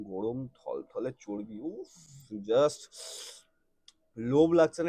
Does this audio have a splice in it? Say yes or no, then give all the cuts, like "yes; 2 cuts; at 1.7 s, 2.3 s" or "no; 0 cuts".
no; 0 cuts